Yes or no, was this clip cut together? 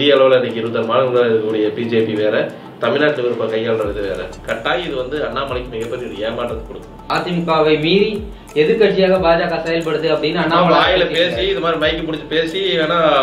yes